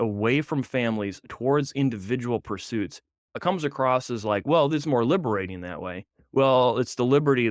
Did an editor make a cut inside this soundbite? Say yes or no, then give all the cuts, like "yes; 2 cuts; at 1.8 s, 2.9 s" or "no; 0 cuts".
yes; 1 cut; at 3.3 s